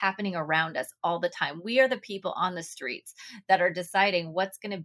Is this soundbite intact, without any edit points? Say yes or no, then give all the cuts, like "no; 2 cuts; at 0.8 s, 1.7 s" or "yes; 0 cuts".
yes; 0 cuts